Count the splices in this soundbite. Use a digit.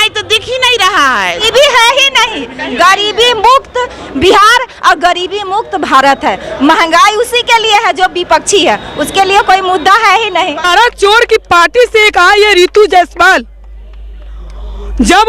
2